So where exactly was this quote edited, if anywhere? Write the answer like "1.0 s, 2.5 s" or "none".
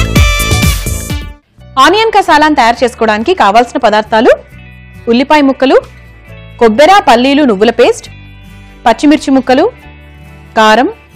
1.3 s